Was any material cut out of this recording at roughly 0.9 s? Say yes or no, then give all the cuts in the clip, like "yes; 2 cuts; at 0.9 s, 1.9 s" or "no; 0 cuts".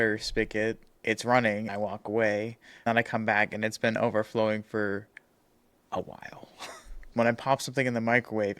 yes; 4 cuts; at 0.9 s, 1.7 s, 2.9 s, 7.1 s